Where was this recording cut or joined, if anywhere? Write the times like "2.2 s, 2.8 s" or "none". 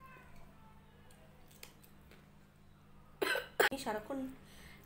3.7 s